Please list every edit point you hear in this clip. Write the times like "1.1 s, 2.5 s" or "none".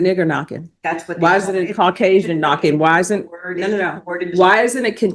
none